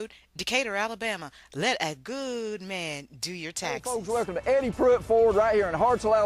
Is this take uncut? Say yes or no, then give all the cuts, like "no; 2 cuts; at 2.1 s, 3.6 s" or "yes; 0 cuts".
no; 1 cut; at 3.9 s